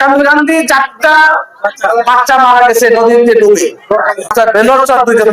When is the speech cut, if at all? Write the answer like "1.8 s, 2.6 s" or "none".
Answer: 4.3 s